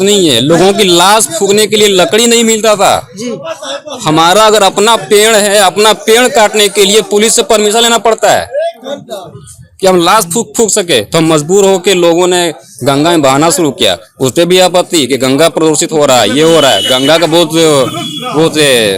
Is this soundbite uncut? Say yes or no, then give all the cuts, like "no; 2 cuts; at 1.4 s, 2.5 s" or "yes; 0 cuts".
yes; 0 cuts